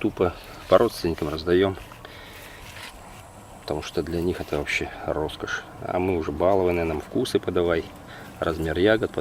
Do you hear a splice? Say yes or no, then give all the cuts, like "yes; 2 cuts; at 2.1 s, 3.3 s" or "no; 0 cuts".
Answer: no; 0 cuts